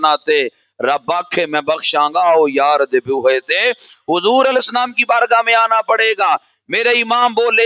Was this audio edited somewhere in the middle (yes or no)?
no